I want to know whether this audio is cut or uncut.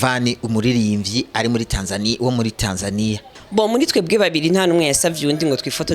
cut